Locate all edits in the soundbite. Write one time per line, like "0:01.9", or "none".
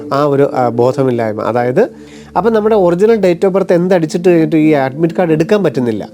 0:02.1